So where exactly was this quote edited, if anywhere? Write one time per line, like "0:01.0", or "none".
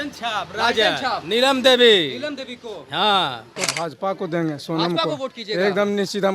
0:03.6